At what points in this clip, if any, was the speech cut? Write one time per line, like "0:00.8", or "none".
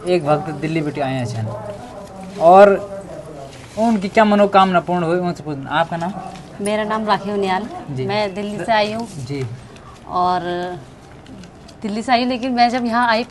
none